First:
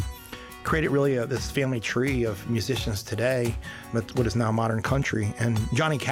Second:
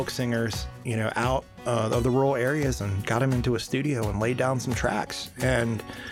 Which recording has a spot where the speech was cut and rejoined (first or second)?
first